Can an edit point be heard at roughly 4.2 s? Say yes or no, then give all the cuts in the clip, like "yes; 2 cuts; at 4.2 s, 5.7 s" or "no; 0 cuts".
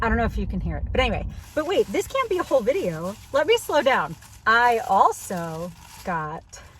no; 1 cut; at 1.4 s